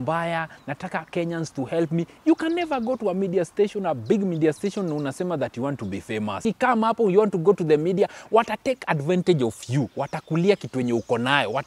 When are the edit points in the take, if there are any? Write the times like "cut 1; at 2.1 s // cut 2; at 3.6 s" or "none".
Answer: cut 1; at 6.4 s

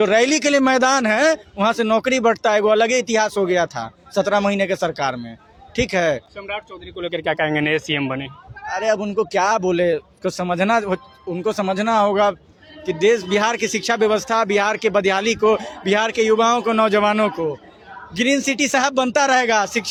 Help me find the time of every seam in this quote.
none

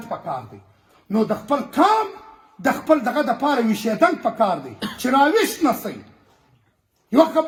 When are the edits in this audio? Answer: none

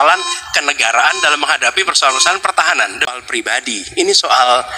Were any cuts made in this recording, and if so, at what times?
cut 1; at 3.1 s

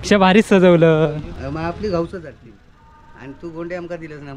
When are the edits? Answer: cut 1; at 1.3 s

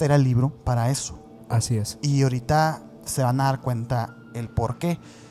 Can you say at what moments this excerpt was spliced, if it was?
none

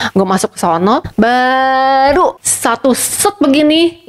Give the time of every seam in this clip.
cut 1; at 1.1 s // cut 2; at 2.5 s

